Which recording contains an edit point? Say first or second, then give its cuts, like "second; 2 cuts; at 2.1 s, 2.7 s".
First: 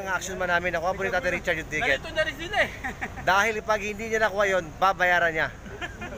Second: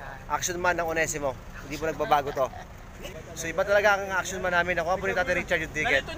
second; 1 cut; at 3.0 s